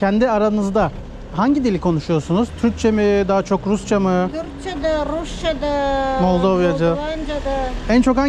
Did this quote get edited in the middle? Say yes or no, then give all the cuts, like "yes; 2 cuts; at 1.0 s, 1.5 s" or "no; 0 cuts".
no; 0 cuts